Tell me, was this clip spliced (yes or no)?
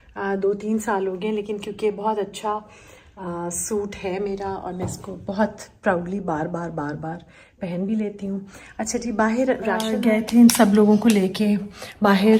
no